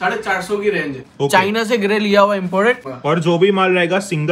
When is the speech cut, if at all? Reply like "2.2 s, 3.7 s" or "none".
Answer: 1.0 s, 2.9 s

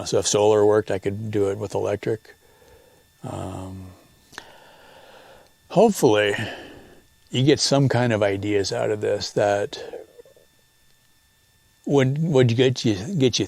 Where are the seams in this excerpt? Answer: 4.4 s

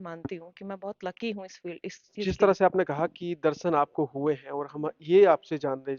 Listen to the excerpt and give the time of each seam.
2.1 s

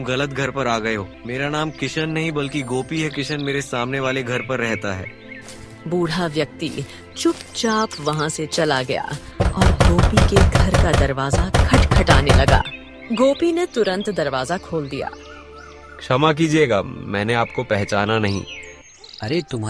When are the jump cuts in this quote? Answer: 1.2 s

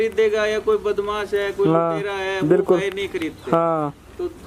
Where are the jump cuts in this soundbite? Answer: none

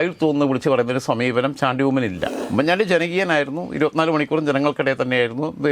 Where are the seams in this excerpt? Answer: 2.3 s

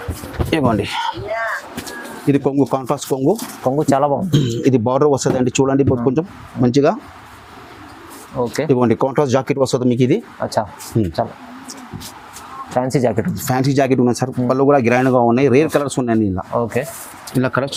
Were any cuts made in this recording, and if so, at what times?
none

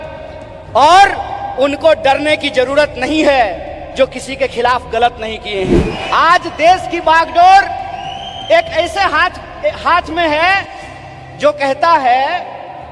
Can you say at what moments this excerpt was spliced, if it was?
5.9 s

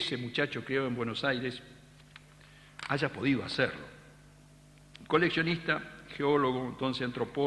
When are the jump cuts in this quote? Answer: 5.3 s

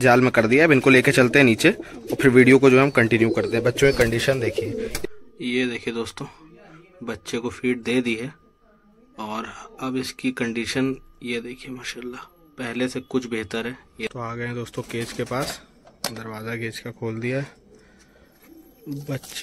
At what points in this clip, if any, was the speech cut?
5.0 s, 14.1 s

